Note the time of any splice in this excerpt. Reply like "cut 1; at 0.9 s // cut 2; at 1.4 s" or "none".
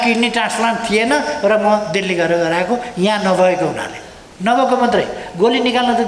none